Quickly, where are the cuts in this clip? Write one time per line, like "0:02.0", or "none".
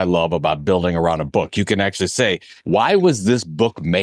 0:02.5